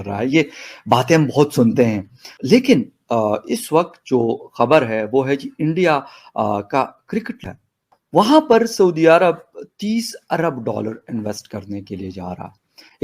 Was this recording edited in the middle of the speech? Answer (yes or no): yes